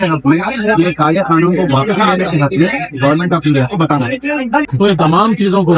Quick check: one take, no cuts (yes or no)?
no